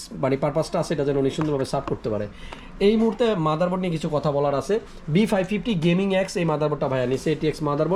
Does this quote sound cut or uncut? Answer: uncut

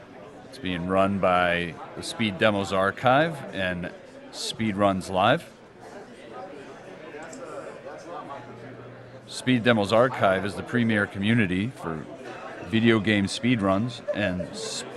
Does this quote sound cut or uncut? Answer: cut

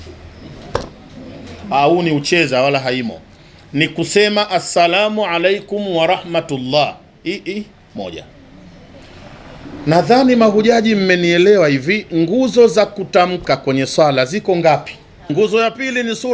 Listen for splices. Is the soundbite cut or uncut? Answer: cut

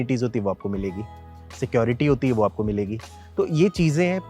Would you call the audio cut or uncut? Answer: uncut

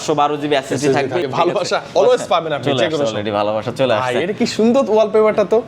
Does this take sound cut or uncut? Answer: cut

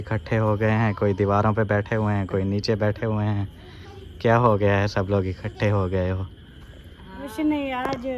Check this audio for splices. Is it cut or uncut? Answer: uncut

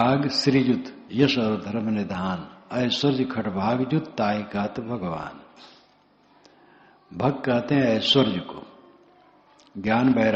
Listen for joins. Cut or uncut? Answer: cut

